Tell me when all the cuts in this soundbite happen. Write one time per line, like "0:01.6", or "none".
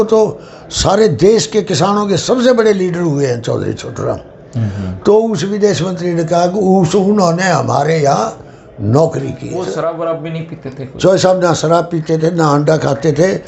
0:09.5